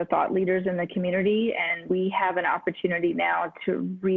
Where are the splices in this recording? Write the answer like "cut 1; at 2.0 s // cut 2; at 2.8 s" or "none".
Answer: cut 1; at 1.8 s